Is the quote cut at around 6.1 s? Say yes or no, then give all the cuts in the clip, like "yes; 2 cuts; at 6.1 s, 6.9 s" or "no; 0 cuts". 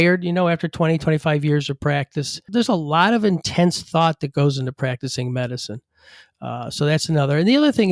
no; 1 cut; at 2.4 s